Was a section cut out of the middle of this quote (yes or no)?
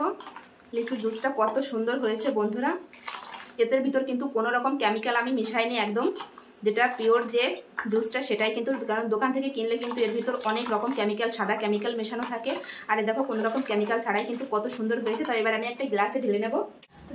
no